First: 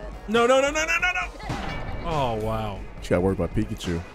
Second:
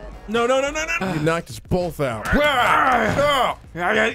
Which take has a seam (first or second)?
first